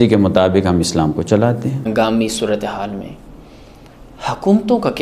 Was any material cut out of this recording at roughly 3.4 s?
no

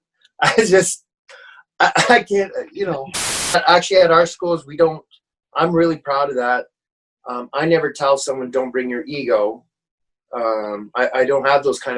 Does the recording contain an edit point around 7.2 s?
no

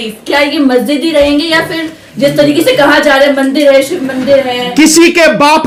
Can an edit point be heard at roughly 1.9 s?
no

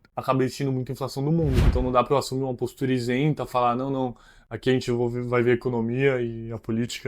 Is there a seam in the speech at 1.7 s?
yes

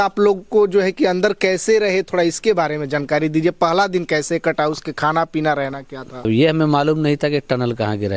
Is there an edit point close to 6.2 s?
yes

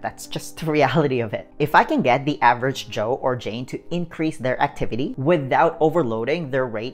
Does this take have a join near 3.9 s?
no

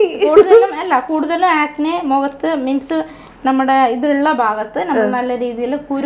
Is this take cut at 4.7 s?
no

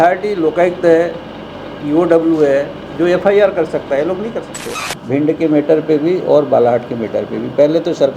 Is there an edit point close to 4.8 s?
yes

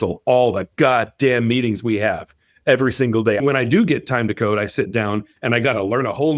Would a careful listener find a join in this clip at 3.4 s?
yes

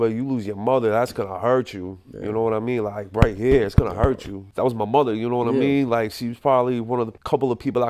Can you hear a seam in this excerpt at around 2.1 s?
no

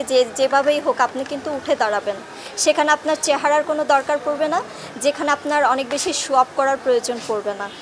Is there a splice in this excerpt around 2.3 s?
no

